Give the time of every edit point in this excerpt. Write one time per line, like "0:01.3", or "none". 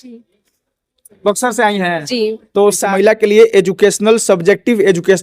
0:02.8